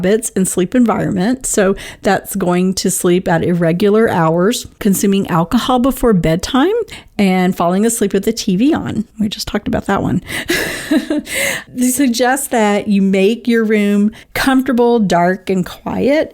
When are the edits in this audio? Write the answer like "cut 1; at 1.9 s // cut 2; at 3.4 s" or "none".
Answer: cut 1; at 4.7 s // cut 2; at 7.0 s // cut 3; at 9.1 s // cut 4; at 14.3 s